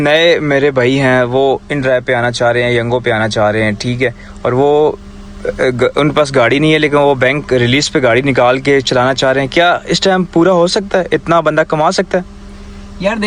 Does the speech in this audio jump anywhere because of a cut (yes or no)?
no